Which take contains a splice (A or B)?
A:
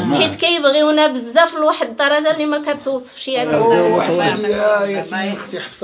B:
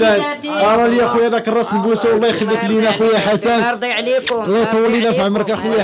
A